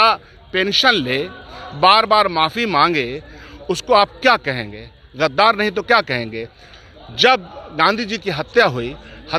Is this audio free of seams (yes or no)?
yes